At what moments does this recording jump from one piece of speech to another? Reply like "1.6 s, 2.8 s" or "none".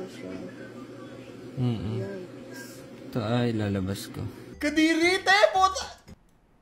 4.4 s